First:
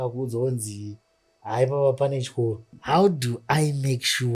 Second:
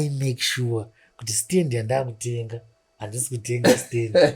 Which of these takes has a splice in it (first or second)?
first